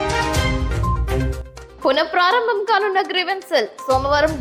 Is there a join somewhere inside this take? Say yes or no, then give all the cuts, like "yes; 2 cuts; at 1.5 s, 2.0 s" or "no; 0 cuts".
no; 0 cuts